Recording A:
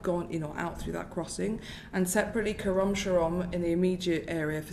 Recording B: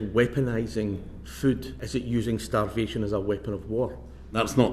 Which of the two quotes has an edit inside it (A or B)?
B